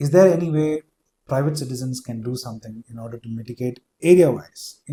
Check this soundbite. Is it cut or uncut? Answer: uncut